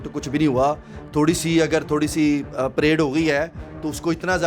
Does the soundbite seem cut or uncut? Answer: uncut